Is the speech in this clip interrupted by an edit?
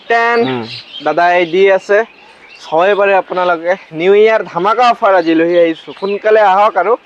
no; 0 cuts

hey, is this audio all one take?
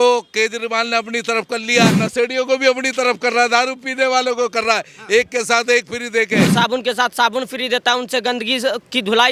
no; 2 cuts; at 2.0 s, 6.5 s

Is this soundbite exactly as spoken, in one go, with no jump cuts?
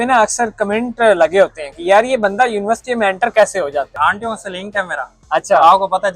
no; 1 cut; at 3.9 s

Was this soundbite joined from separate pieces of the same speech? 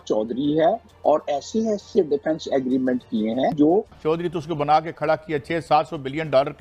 yes; 1 cut; at 3.9 s

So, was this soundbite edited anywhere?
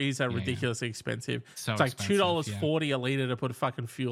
no; 0 cuts

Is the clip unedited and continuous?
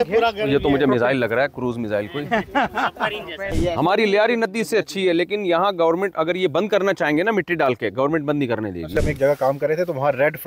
no; 2 cuts; at 3.5 s, 8.9 s

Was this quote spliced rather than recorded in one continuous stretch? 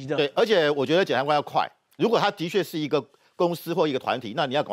no; 0 cuts

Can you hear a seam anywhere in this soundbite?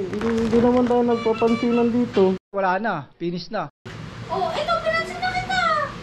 no; 0 cuts

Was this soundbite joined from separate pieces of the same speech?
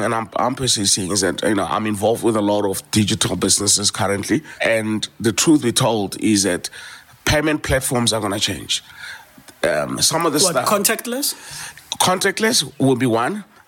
yes; 1 cut; at 4.5 s

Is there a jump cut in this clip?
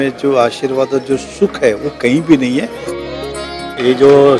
yes; 1 cut; at 3.3 s

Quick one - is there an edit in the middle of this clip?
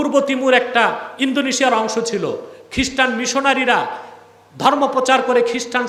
no; 0 cuts

